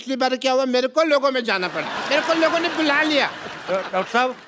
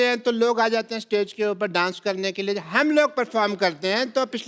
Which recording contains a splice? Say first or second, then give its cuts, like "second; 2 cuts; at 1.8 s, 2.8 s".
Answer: first; 1 cut; at 1.9 s